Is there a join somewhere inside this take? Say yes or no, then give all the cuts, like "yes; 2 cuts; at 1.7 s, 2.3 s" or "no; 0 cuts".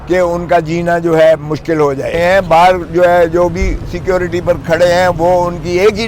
yes; 1 cut; at 2.1 s